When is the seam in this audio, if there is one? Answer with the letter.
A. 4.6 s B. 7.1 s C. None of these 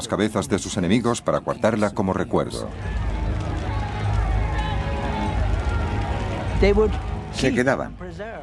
C